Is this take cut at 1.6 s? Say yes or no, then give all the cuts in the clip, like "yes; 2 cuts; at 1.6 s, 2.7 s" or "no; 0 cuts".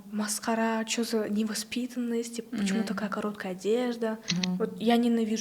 no; 1 cut; at 4.3 s